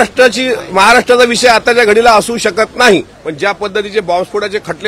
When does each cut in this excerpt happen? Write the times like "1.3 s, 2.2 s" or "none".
3.2 s

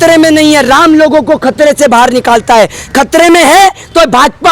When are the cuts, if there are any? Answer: none

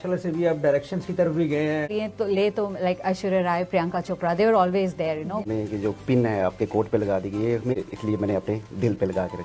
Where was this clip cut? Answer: 1.9 s, 5.5 s, 7.8 s

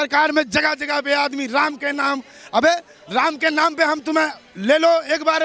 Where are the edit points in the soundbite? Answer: none

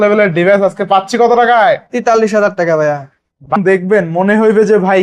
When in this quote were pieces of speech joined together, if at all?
3.5 s

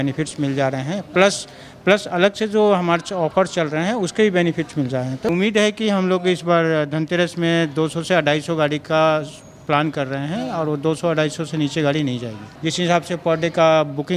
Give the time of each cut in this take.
5.3 s, 12.4 s

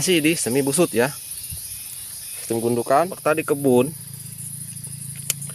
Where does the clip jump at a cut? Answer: 3.2 s

